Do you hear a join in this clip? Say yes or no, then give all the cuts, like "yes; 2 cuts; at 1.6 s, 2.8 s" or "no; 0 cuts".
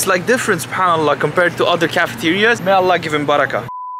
no; 0 cuts